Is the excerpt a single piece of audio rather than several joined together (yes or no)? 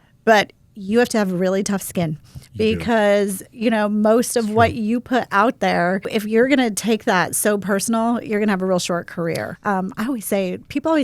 no